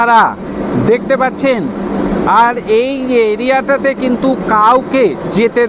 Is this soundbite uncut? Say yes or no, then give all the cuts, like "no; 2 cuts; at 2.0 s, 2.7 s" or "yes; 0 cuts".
yes; 0 cuts